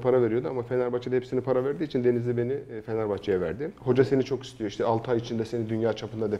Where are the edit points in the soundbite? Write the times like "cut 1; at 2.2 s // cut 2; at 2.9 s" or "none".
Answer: cut 1; at 3.7 s